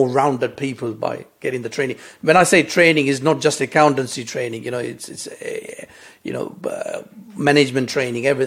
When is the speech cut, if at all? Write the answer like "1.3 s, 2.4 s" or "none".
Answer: none